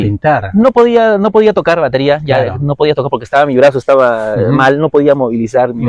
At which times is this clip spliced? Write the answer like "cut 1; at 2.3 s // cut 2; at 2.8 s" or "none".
none